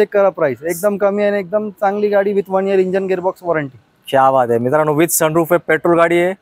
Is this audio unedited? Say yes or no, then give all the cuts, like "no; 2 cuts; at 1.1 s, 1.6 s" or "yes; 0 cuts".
yes; 0 cuts